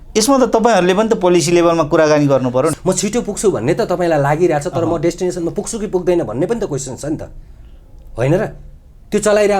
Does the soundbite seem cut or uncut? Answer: cut